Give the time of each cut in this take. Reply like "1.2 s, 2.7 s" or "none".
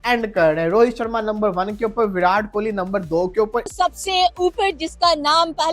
3.7 s